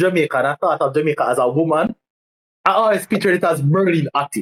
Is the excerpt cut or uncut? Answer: uncut